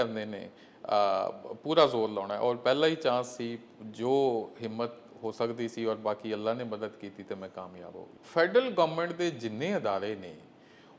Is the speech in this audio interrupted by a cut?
yes; 1 cut; at 8.2 s

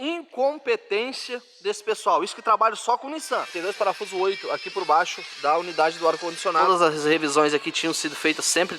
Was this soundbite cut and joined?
yes; 2 cuts; at 3.5 s, 6.6 s

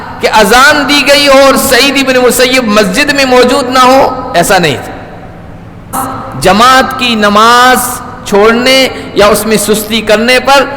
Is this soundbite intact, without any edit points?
no; 1 cut; at 6.0 s

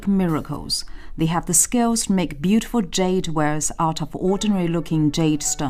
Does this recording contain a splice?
yes; 1 cut; at 4.4 s

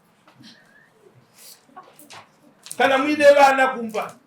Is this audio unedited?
no; 1 cut; at 2.6 s

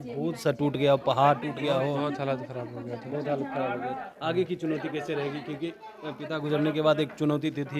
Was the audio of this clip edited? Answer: no; 0 cuts

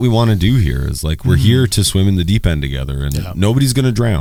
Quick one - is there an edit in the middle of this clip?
no; 0 cuts

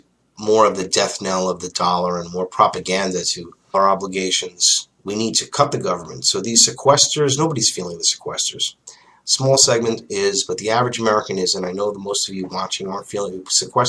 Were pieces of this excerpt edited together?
no; 0 cuts

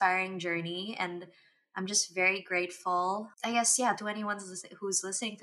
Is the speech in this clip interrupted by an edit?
no; 0 cuts

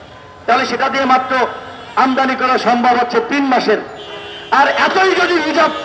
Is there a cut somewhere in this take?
no; 0 cuts

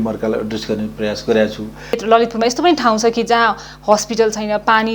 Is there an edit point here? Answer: yes; 1 cut; at 1.9 s

